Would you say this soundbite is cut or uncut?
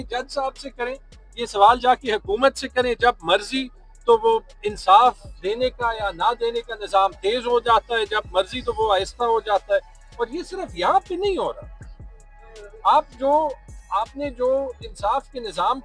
uncut